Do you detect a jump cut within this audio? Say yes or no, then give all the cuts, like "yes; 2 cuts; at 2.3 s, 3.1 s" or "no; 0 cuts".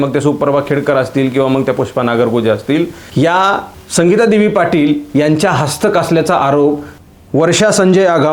yes; 2 cuts; at 3.8 s, 6.9 s